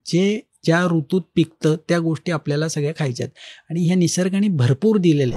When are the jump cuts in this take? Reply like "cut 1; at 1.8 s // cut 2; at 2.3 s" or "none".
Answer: none